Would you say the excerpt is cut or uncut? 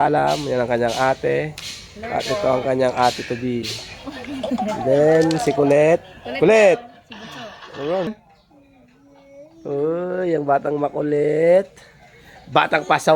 cut